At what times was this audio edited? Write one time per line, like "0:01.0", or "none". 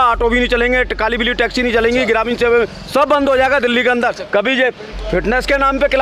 0:04.2